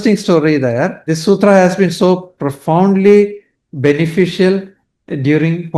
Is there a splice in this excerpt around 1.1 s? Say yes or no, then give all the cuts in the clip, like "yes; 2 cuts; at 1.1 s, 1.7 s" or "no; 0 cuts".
yes; 1 cut; at 1.1 s